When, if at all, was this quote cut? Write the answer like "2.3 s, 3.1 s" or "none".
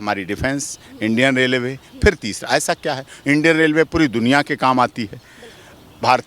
none

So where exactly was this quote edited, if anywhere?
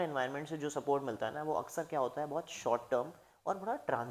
none

